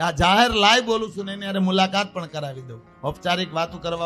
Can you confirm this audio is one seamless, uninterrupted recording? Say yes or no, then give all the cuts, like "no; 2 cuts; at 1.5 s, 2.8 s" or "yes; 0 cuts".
yes; 0 cuts